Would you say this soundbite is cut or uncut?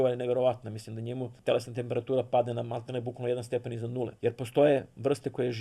cut